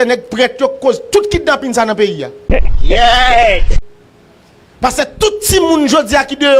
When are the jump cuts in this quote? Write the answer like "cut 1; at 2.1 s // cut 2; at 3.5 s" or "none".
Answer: cut 1; at 2.3 s // cut 2; at 4.4 s